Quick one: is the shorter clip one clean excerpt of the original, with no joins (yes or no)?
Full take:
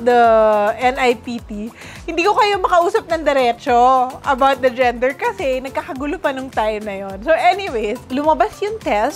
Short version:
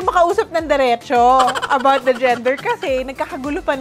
yes